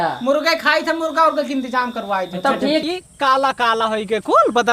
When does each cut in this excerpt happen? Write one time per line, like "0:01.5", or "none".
0:02.8

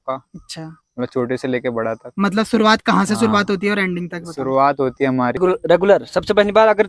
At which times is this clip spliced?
0:05.4

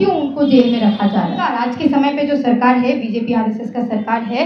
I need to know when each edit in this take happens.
0:01.6

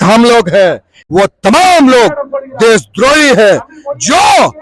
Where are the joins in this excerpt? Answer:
0:00.9

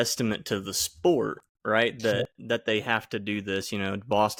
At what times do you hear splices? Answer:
none

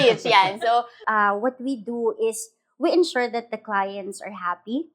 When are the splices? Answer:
0:01.0

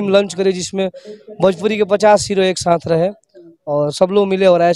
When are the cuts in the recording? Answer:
none

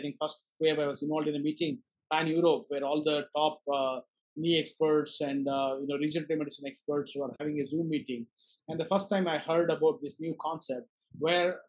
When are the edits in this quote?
none

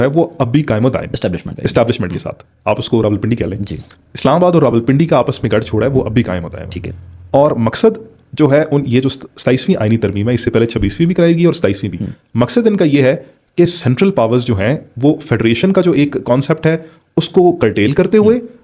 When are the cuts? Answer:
none

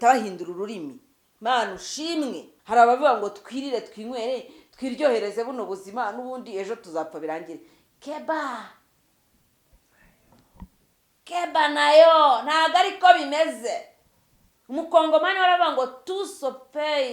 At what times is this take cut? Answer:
0:02.5

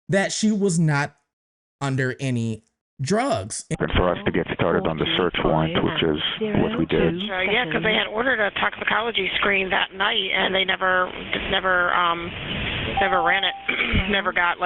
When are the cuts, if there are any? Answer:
0:03.8

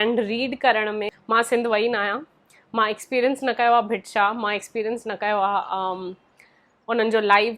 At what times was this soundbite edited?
0:01.1

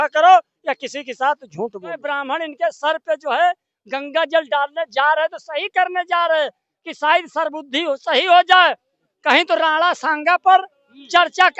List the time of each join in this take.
0:02.1

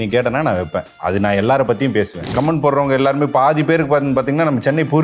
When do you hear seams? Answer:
0:00.9
0:02.3

